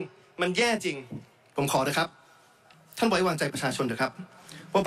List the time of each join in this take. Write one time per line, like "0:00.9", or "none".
none